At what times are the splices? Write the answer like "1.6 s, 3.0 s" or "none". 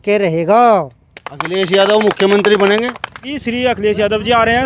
3.4 s